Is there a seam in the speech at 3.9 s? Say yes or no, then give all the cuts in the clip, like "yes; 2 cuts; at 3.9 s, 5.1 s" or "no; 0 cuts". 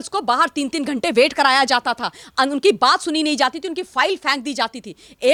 no; 0 cuts